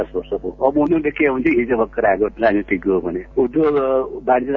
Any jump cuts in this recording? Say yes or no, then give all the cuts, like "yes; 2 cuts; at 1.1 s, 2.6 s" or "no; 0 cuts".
yes; 1 cut; at 3.2 s